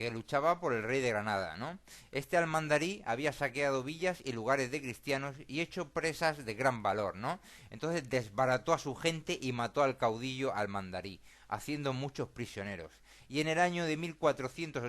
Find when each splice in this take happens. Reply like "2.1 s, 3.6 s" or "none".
4.2 s